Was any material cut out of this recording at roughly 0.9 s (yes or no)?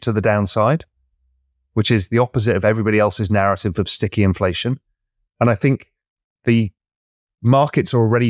no